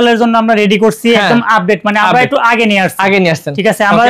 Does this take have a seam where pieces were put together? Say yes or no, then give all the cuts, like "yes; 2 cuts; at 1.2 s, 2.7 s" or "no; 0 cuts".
no; 0 cuts